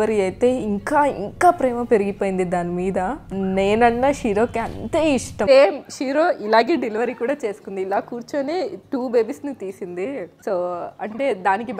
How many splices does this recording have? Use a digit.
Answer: 2